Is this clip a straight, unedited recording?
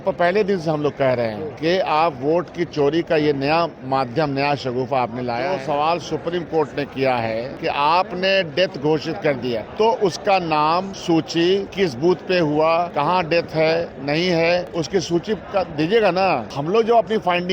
no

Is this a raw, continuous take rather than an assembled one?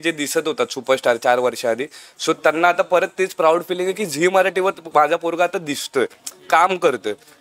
yes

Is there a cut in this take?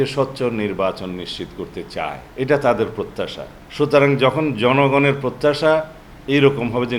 no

